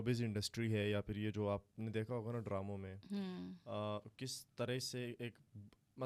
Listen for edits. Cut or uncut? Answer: uncut